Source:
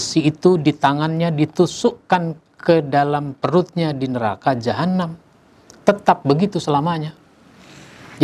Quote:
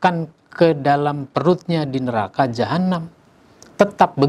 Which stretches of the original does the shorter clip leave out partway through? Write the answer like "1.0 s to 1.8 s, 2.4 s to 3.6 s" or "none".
none